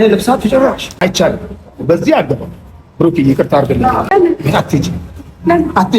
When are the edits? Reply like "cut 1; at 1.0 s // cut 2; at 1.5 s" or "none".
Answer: cut 1; at 1.0 s // cut 2; at 4.1 s